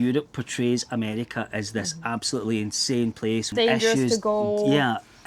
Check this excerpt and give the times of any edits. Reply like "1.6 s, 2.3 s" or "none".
3.5 s